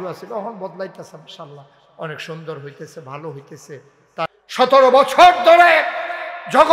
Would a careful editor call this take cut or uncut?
cut